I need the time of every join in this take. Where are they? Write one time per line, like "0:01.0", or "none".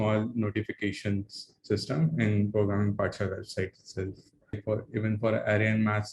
0:04.6